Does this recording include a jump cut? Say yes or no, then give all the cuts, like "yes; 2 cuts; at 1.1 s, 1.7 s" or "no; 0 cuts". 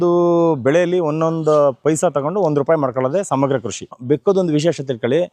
yes; 1 cut; at 4.0 s